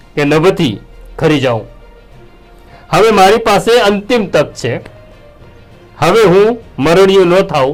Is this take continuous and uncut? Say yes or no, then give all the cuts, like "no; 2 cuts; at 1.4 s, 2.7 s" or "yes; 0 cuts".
yes; 0 cuts